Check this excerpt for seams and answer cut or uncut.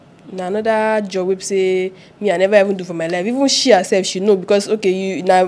uncut